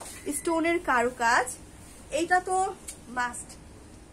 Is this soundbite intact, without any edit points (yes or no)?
yes